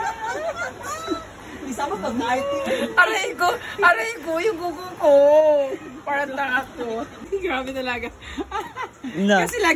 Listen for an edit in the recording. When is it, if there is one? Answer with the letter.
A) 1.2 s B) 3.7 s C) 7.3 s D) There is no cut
C